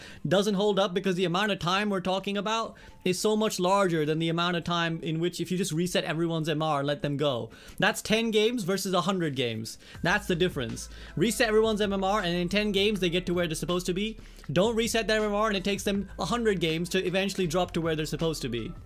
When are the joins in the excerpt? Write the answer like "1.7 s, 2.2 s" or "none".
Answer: none